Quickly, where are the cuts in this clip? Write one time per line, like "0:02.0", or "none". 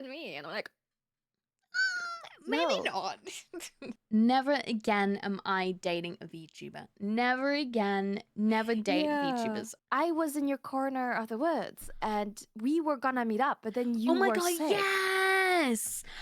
0:03.9
0:09.7